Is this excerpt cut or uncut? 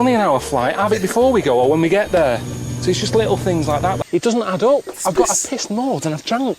cut